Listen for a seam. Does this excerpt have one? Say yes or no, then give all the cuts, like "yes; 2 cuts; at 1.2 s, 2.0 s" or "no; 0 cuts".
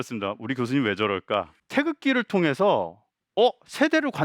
yes; 1 cut; at 1.6 s